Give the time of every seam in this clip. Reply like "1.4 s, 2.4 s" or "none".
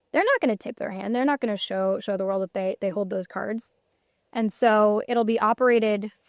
none